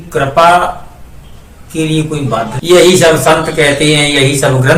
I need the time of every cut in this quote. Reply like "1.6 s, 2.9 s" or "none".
2.6 s